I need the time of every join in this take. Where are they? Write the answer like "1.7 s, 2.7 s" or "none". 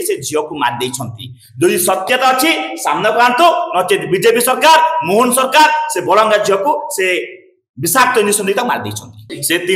none